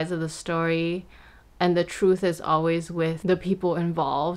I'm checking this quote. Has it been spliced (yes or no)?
yes